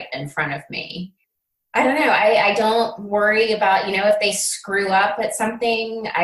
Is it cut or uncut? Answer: cut